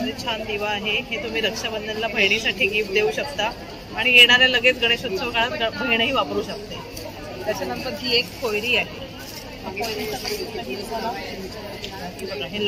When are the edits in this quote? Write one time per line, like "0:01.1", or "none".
none